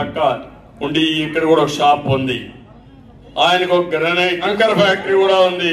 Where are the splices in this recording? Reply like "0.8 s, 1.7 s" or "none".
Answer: 4.4 s